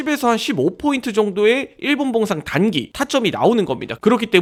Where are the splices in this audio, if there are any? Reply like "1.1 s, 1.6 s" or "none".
none

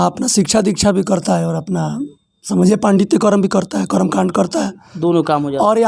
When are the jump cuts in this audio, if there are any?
none

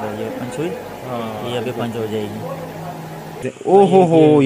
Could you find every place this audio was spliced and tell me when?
3.5 s

